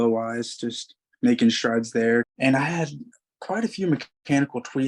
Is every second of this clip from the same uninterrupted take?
no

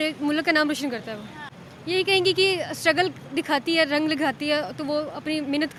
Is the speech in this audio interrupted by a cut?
no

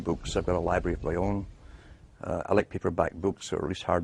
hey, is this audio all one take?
no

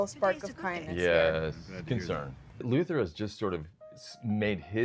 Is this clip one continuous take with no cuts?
no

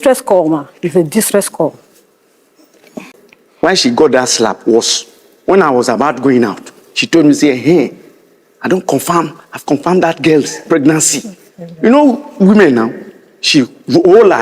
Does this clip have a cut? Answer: yes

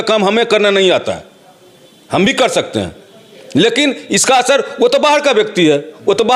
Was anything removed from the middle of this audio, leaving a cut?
no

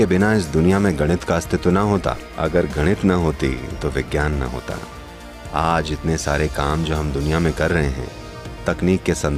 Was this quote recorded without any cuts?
yes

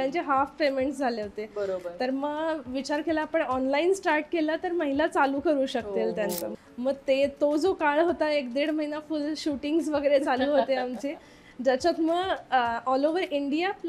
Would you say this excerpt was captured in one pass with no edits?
no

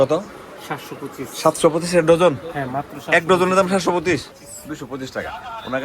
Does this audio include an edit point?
yes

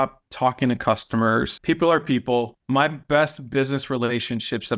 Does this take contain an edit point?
yes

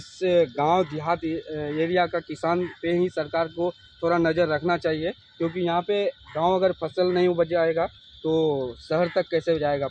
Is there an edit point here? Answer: no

